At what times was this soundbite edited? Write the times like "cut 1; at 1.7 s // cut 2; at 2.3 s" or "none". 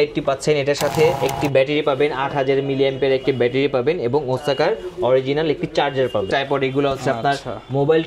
cut 1; at 1.2 s // cut 2; at 6.3 s